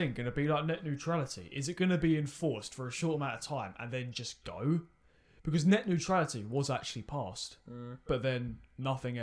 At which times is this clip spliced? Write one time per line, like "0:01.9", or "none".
none